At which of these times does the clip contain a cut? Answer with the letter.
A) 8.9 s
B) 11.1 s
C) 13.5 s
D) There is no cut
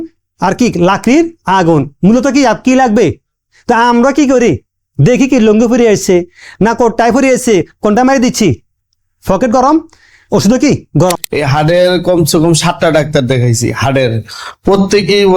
B